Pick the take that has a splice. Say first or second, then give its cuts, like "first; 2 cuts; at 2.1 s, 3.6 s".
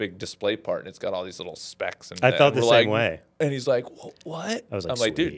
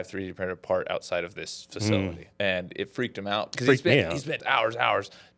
second; 3 cuts; at 2.2 s, 3.5 s, 4.4 s